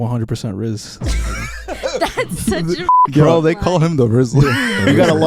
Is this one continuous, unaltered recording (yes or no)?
yes